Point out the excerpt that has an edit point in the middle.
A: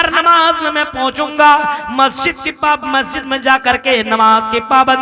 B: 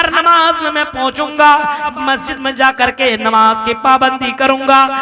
B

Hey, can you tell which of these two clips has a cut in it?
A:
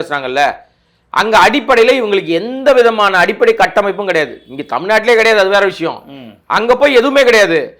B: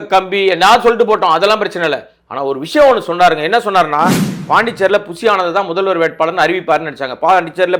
B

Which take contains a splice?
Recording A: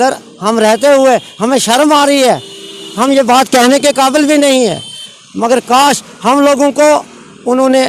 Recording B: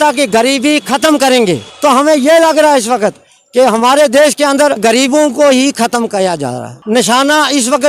B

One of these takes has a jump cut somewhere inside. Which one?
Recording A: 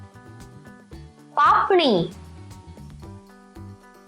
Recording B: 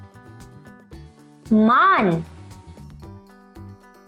A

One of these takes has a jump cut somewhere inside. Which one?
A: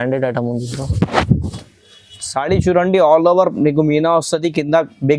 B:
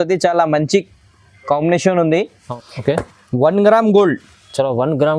B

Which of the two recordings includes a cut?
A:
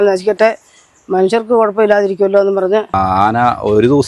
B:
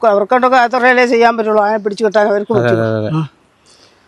A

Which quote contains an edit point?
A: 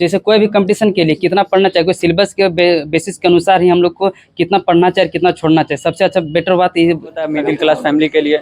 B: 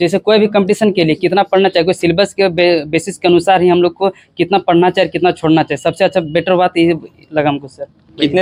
A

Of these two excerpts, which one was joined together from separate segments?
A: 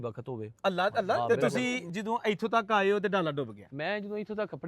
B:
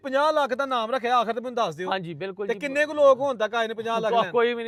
A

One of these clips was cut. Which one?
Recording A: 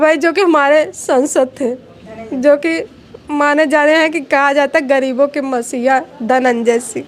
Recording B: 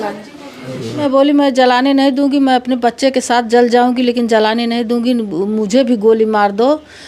B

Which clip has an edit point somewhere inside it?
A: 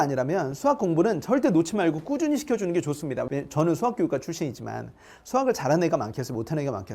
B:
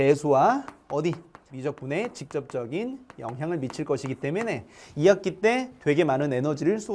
A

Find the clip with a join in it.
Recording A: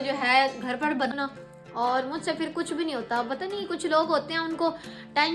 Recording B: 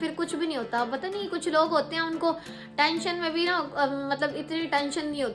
A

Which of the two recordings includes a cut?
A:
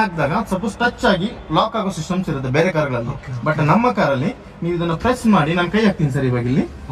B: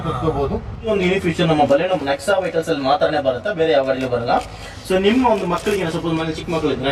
B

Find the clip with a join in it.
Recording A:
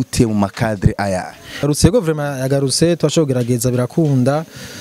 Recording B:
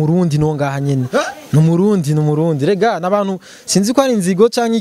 A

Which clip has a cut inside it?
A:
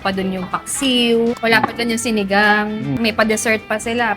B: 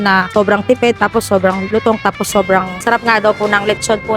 A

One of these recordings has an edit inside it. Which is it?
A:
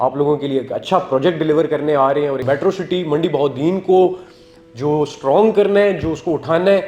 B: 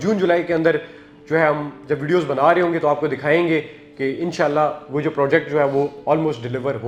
A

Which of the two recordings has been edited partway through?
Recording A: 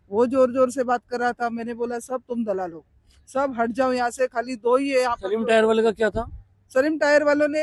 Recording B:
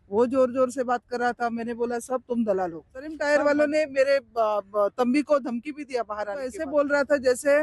B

